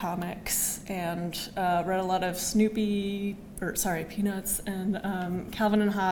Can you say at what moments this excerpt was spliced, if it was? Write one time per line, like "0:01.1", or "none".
none